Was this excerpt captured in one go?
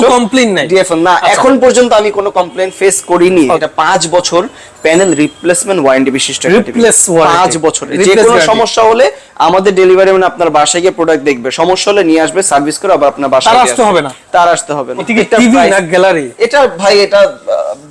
no; 3 cuts; at 3.6 s, 7.9 s, 15.0 s

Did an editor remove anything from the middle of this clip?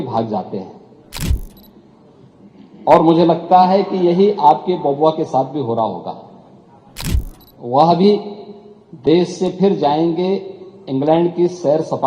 no; 0 cuts

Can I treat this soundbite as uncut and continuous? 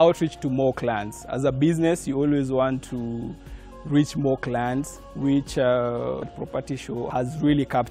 no; 2 cuts; at 5.0 s, 6.3 s

